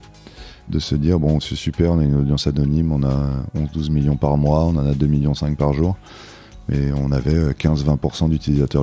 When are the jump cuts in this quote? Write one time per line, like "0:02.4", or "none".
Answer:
none